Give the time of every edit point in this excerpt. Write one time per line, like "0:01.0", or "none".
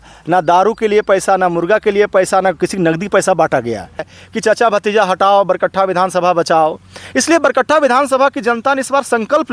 0:04.2